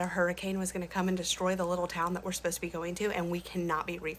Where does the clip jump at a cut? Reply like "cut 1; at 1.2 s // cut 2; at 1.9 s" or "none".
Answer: cut 1; at 3.1 s